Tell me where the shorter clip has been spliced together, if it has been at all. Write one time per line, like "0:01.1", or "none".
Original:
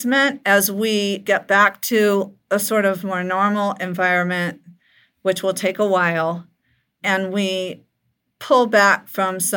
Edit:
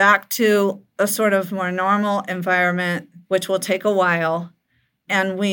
0:03.1